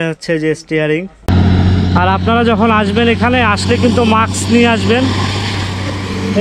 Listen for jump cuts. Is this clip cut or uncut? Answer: cut